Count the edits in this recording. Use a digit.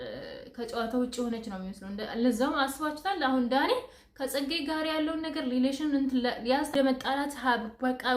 1